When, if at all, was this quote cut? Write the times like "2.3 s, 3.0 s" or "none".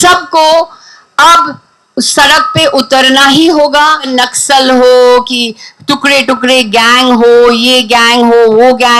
4.1 s